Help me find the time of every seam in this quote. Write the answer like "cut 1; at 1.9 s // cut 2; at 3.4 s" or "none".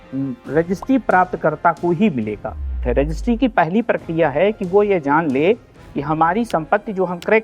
cut 1; at 2.8 s

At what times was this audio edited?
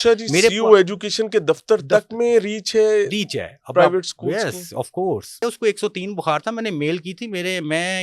cut 1; at 5.4 s

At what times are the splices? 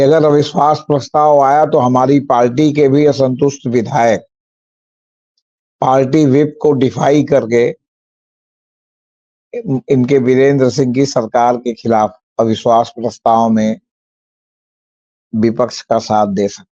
none

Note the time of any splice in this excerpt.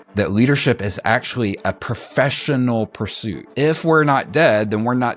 cut 1; at 3.5 s

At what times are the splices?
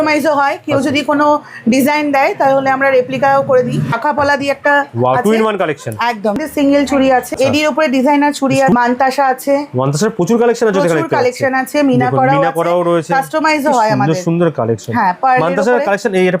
cut 1; at 3.9 s // cut 2; at 6.4 s // cut 3; at 7.3 s // cut 4; at 8.7 s

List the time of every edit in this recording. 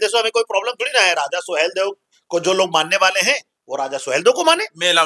none

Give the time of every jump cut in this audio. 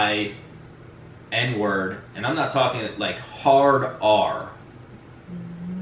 none

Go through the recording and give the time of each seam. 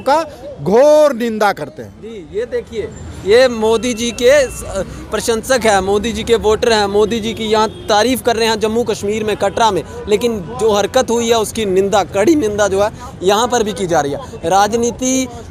none

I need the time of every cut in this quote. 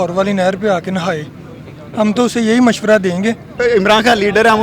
cut 1; at 3.5 s

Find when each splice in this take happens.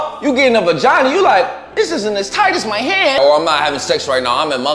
cut 1; at 3.2 s

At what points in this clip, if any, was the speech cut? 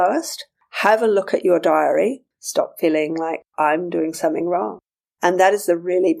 cut 1; at 2.3 s

